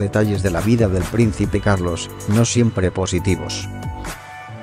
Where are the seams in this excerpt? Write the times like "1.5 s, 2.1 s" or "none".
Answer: 3.5 s